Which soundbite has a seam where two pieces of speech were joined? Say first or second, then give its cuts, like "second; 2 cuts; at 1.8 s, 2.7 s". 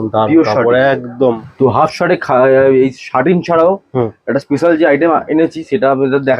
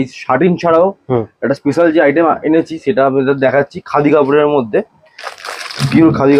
first; 1 cut; at 1.1 s